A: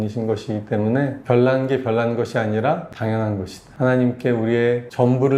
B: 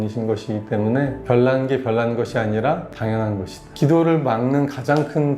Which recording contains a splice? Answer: B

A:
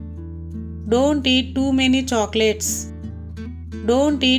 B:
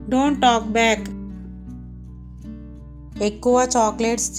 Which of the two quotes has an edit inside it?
B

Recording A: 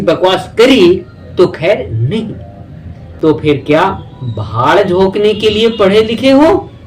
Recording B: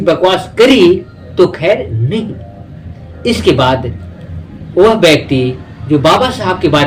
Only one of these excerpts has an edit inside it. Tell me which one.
A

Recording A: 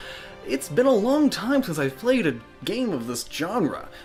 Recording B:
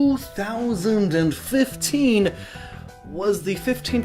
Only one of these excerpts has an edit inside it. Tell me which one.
B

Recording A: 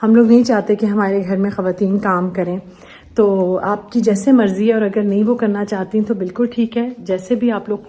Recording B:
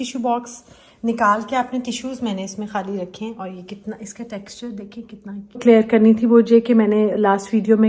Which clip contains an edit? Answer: B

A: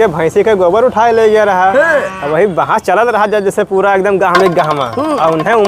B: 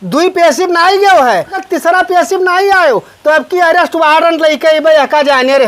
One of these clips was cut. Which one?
B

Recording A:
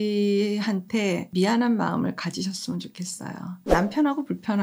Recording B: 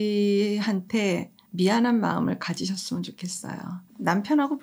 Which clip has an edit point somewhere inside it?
A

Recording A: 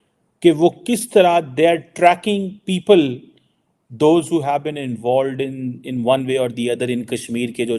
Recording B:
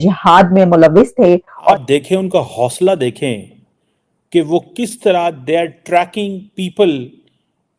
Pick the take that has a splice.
B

